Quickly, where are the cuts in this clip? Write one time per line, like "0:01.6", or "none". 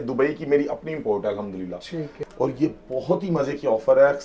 0:02.1